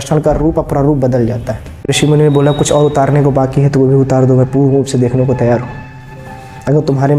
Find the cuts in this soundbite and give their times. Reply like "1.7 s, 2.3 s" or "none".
1.9 s